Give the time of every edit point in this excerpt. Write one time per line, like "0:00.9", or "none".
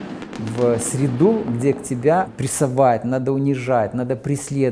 0:02.3

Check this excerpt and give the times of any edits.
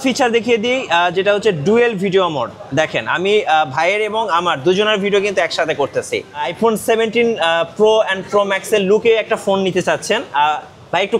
0:06.5

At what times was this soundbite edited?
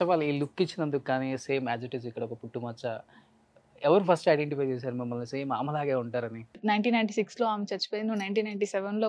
0:06.6

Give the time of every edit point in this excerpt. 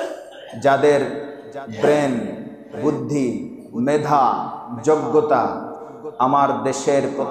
none

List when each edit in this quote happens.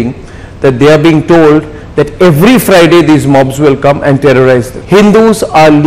0:04.7

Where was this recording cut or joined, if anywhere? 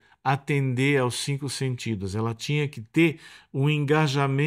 none

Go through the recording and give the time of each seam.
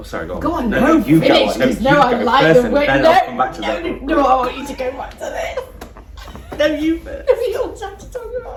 none

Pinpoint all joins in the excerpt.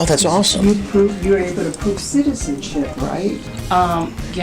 0:03.5

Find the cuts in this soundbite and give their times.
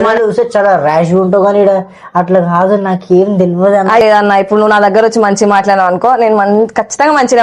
0:04.0

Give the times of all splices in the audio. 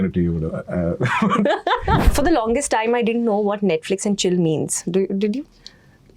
0:02.1

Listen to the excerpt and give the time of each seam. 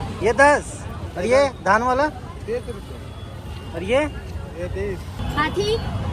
0:05.2

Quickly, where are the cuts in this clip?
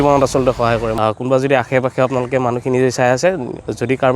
0:00.9

